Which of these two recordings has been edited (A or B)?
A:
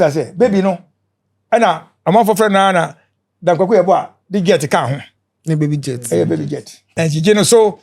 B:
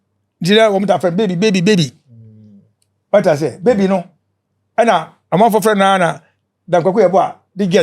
A